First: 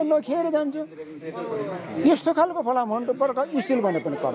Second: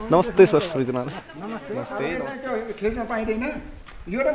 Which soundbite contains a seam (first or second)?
second